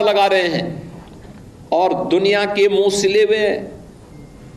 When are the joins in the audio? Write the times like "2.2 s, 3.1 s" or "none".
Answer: none

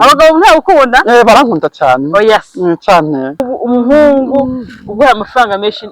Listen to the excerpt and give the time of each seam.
3.5 s

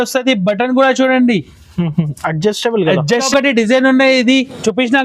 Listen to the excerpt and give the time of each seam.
3.2 s

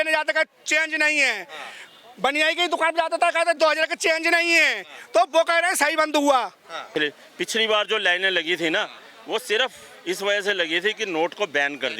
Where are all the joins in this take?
6.7 s

